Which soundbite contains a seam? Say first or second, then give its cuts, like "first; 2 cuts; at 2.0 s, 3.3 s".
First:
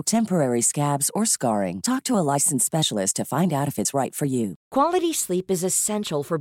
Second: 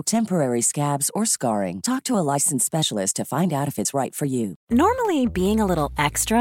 second; 1 cut; at 4.6 s